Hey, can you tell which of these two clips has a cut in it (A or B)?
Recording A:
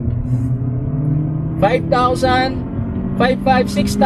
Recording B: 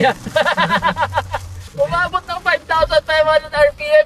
B